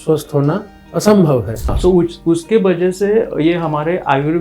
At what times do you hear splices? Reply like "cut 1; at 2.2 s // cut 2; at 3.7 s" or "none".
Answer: cut 1; at 1.7 s